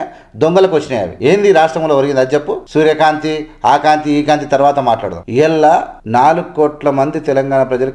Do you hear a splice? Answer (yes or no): yes